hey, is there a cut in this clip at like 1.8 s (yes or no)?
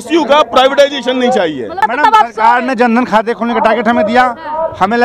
yes